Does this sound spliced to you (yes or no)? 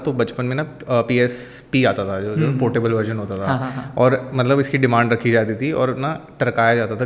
no